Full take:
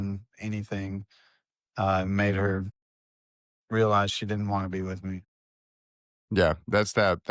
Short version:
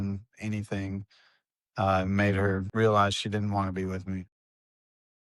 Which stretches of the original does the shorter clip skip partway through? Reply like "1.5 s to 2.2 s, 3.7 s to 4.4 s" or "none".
2.7 s to 3.6 s